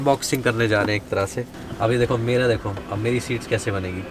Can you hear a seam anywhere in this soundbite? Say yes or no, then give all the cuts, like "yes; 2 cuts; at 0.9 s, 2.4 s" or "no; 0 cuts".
yes; 1 cut; at 1.5 s